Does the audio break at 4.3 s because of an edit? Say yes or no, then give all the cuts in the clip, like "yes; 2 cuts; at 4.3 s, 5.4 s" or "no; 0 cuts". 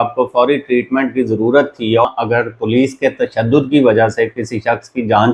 no; 1 cut; at 2.1 s